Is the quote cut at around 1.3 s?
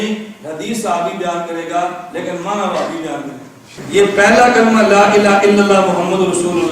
no; 1 cut; at 3.8 s

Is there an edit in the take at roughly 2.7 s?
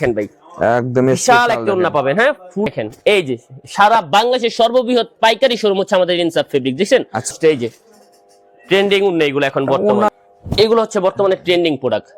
yes; 3 cuts; at 2.7 s, 7.3 s, 10.1 s

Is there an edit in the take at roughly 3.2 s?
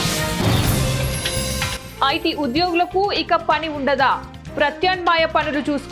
no; 1 cut; at 1.7 s

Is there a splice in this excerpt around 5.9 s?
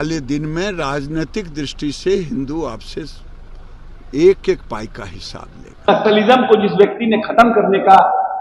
yes; 1 cut; at 5.9 s

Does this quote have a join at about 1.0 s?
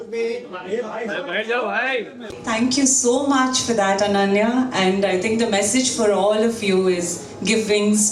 no; 1 cut; at 2.3 s

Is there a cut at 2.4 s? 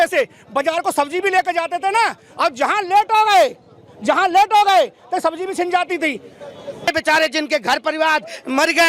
no; 1 cut; at 6.9 s

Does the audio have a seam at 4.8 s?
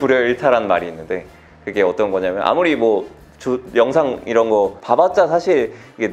yes; 1 cut; at 4.8 s

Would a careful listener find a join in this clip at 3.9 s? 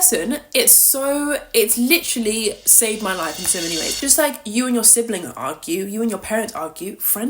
yes; 1 cut; at 3.9 s

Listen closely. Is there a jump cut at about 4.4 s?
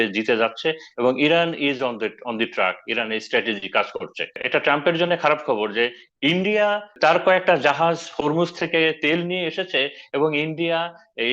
yes; 2 cuts; at 4.4 s, 6.9 s

